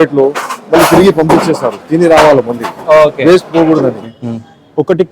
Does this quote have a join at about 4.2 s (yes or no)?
yes